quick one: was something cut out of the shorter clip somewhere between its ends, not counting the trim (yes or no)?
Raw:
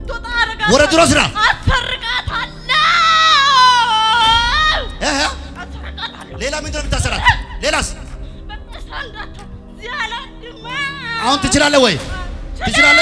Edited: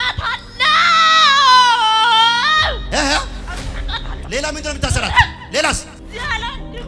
yes